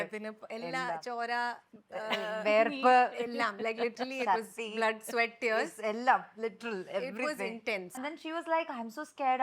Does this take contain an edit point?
yes; 1 cut; at 8.0 s

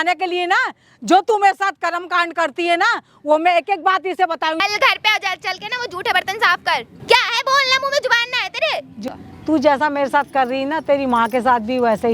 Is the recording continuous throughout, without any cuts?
no; 3 cuts; at 4.6 s, 6.9 s, 9.1 s

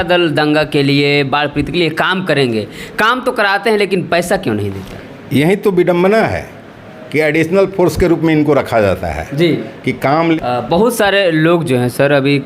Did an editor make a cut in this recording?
yes; 1 cut; at 10.4 s

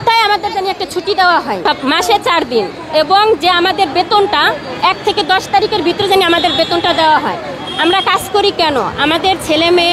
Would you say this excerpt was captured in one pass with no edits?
yes; 0 cuts

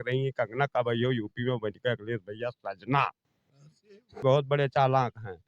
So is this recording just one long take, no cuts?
no; 1 cut; at 4.2 s

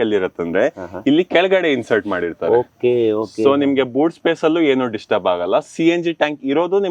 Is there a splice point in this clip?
no; 0 cuts

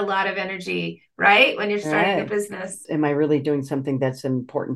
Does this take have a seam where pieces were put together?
yes; 1 cut; at 2.8 s

